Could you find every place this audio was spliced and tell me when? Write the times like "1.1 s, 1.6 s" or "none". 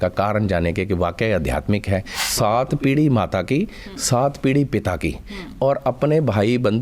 2.1 s